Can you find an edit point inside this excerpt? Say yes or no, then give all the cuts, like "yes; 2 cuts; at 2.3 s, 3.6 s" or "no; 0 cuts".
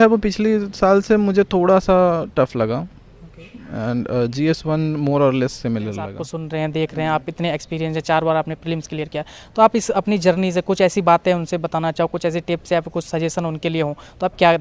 yes; 1 cut; at 6.3 s